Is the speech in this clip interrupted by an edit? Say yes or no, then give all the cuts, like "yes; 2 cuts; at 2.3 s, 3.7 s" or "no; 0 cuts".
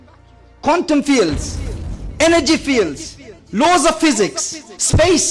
no; 0 cuts